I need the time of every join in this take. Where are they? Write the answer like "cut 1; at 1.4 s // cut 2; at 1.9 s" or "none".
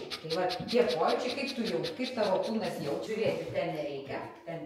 cut 1; at 3.0 s

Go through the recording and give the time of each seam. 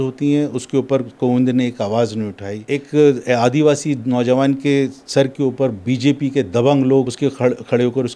cut 1; at 2.5 s // cut 2; at 7.1 s

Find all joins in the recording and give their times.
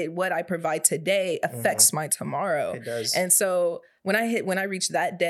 none

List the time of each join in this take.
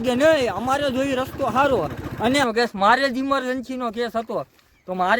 cut 1; at 2.4 s

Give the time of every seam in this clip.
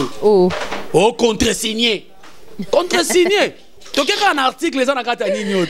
none

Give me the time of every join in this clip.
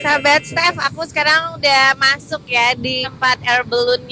none

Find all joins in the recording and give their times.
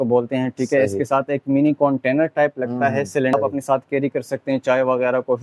cut 1; at 3.3 s

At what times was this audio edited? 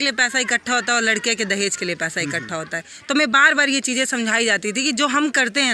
cut 1; at 2.9 s

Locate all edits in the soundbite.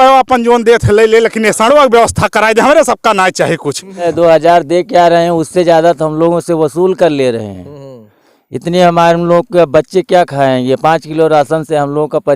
cut 1; at 4.1 s

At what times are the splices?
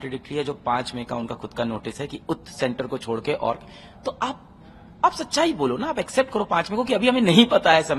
none

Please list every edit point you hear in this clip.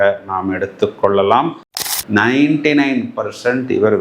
cut 1; at 1.8 s

